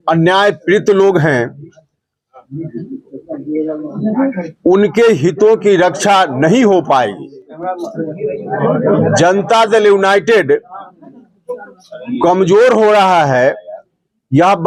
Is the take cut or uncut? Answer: cut